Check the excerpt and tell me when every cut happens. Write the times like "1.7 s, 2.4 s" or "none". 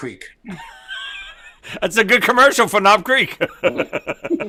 none